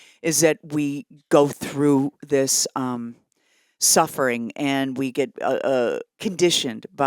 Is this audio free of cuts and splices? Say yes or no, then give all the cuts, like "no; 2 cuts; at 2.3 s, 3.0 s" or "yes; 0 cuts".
no; 1 cut; at 6.1 s